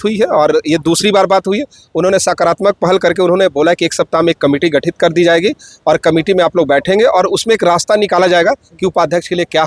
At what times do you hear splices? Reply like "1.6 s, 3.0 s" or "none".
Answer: none